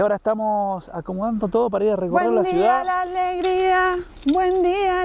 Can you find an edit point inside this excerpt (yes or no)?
no